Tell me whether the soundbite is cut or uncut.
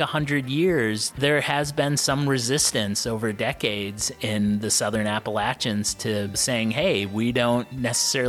cut